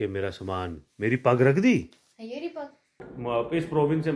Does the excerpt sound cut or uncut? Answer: cut